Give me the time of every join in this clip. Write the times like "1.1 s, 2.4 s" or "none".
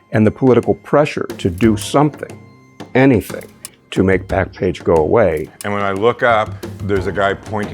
5.5 s, 6.7 s